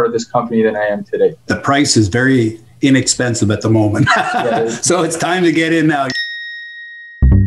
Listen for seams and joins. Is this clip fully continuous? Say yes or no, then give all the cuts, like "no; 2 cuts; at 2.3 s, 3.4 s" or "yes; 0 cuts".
no; 2 cuts; at 1.5 s, 6.1 s